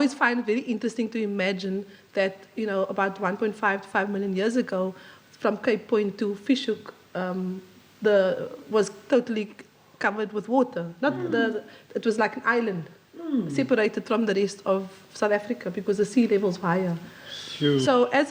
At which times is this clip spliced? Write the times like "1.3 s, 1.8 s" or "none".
none